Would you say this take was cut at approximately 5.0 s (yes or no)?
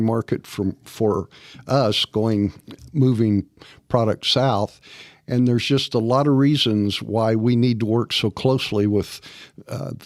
no